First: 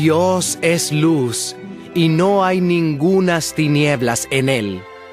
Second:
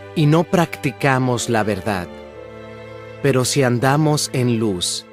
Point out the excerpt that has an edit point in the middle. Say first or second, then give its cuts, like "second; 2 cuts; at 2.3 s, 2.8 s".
first; 1 cut; at 4.0 s